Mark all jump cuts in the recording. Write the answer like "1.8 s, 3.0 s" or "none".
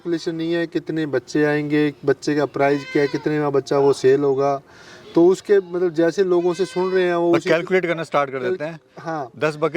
none